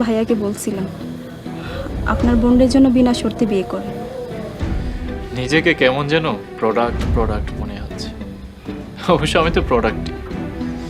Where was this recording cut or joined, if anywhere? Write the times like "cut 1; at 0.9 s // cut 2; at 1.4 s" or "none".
cut 1; at 9.9 s